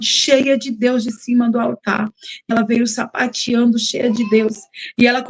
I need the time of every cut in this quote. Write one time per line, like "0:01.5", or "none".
0:02.5